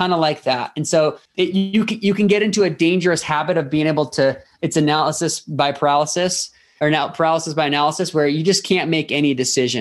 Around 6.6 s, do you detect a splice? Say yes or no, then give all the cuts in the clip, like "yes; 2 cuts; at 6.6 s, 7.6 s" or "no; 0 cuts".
no; 1 cut; at 1.2 s